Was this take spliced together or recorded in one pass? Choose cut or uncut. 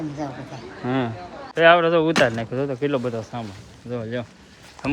cut